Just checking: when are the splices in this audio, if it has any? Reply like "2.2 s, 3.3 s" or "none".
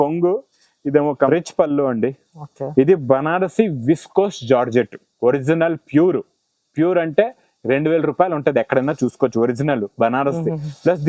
1.3 s